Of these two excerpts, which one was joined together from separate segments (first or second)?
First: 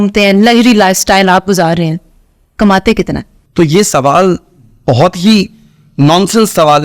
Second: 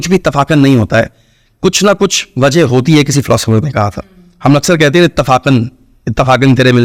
first